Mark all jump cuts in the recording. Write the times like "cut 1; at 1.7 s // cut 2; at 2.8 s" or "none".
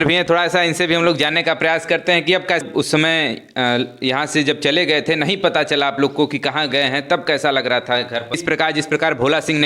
cut 1; at 2.6 s // cut 2; at 8.4 s